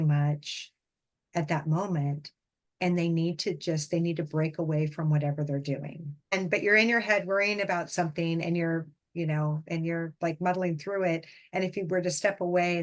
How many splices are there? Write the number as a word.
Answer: one